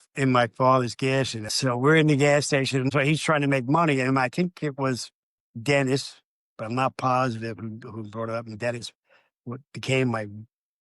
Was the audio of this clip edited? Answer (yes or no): yes